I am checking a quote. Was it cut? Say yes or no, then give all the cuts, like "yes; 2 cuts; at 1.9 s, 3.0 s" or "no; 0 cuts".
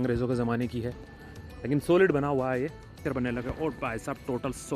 yes; 1 cut; at 2.9 s